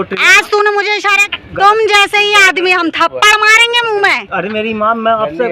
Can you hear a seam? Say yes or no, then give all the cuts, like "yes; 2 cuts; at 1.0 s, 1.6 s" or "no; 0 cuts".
yes; 1 cut; at 1.2 s